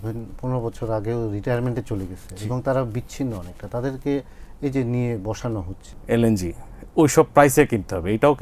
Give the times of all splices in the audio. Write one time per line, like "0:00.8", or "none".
0:05.9